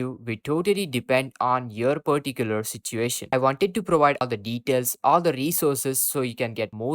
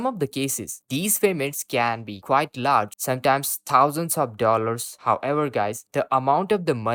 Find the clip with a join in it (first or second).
first